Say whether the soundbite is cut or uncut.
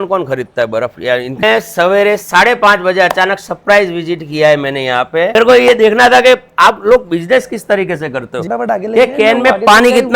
cut